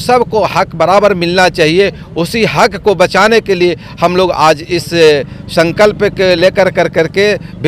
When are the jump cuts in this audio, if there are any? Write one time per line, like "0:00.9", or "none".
none

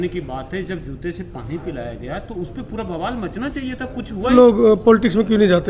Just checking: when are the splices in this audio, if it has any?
0:04.3

